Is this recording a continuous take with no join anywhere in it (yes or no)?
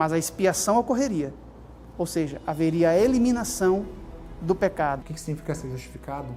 no